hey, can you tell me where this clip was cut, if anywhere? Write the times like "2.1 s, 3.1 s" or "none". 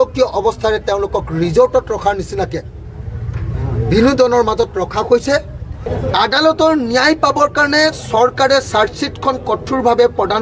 5.9 s